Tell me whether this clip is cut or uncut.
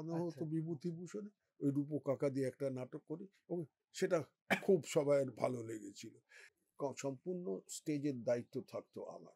cut